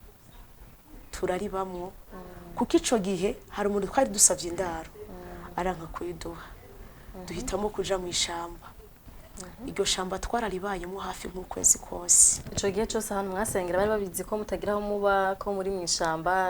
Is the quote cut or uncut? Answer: uncut